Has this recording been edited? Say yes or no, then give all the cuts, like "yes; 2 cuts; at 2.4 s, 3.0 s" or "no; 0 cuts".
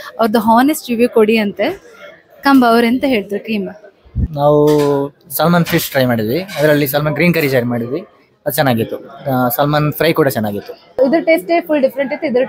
yes; 2 cuts; at 4.2 s, 11.0 s